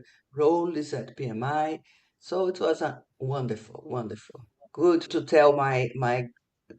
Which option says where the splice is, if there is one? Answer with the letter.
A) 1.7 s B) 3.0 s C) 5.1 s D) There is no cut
C